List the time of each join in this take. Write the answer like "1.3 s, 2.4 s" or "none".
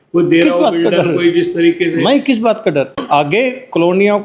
3.0 s